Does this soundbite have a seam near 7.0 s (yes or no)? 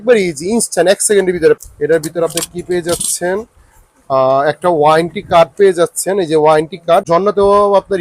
yes